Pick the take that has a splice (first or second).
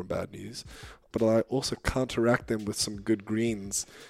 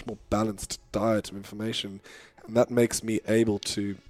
first